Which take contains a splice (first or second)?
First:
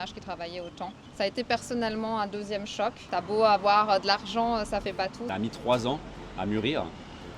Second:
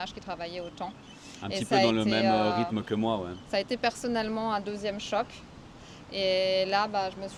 first